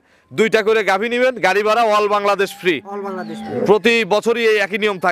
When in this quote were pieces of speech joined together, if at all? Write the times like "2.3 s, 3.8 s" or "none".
none